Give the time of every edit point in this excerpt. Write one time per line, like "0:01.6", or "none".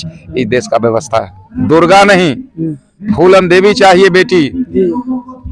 0:01.6